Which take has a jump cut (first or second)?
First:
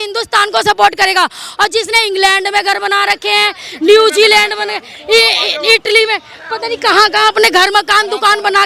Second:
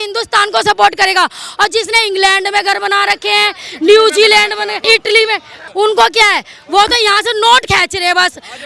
second